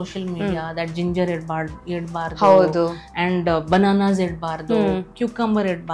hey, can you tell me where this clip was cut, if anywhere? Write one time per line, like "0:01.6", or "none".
none